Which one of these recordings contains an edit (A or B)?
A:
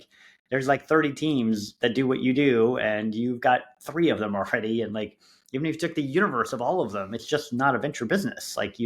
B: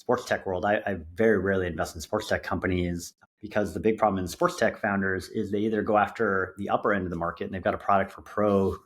B